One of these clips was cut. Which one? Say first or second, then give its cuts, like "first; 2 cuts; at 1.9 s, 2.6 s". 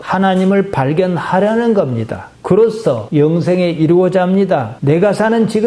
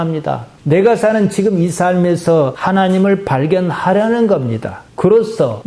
first; 1 cut; at 4.7 s